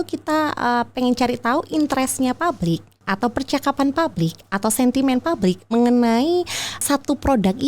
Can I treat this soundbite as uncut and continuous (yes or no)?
no